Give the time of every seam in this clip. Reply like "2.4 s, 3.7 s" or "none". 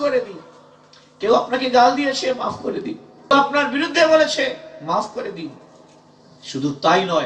3.3 s

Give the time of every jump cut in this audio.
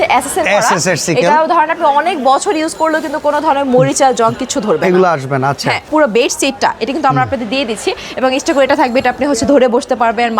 5.9 s

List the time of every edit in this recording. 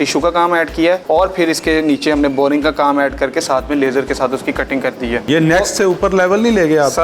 1.0 s, 5.3 s

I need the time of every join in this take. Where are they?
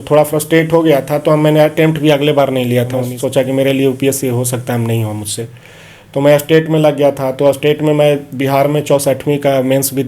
3.1 s

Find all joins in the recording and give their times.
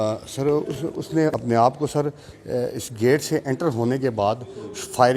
1.4 s

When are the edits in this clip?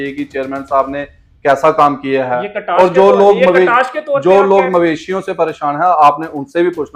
none

